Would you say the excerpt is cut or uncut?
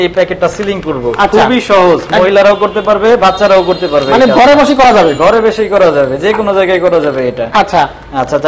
uncut